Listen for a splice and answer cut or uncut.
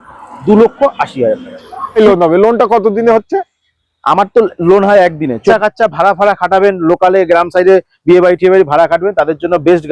cut